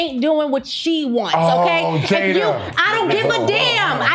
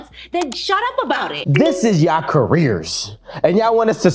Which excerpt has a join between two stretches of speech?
second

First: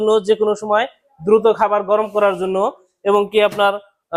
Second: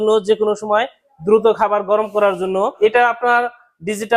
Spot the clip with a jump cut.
second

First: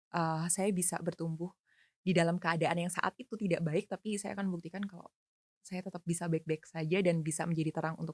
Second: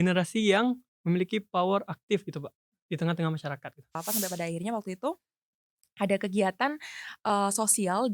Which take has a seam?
second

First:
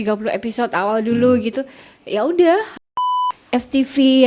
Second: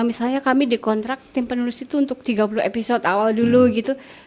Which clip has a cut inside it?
first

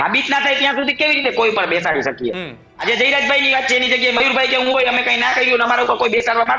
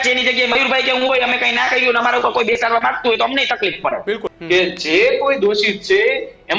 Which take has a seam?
second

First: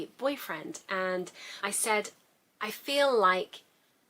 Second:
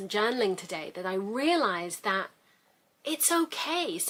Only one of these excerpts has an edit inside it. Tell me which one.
first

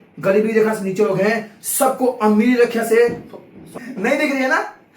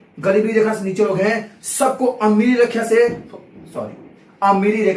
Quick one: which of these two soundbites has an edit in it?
first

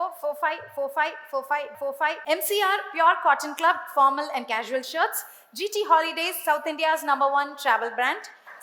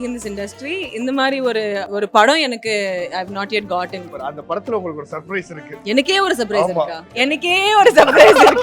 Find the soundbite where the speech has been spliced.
second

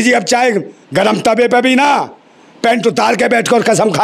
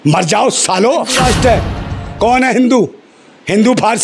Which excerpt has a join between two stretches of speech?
second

